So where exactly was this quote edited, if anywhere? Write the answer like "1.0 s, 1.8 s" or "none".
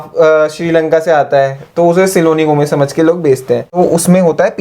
3.7 s